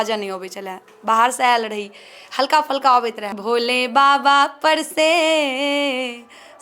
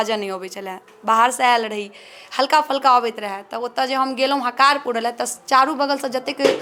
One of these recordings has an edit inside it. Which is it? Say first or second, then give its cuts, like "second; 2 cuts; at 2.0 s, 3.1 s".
first; 1 cut; at 3.4 s